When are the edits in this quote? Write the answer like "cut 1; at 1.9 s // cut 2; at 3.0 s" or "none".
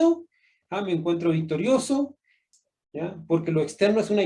cut 1; at 2.5 s